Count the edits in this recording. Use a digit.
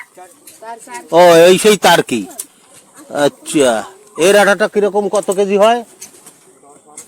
0